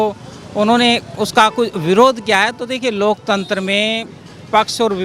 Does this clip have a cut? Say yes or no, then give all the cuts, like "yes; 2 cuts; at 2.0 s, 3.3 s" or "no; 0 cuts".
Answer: no; 0 cuts